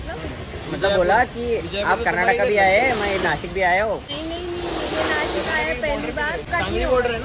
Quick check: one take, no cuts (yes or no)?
no